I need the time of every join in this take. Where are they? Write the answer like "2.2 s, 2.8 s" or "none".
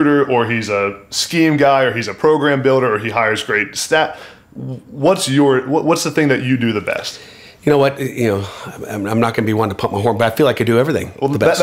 none